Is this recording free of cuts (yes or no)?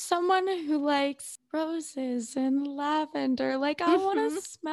no